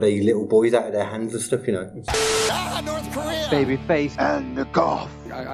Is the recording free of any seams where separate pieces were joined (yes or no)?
no